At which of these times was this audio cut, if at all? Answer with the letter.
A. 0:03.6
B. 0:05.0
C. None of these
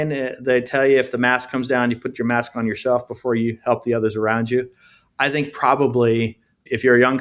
C